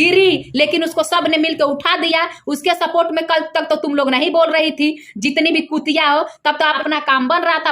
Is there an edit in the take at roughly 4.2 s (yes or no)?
no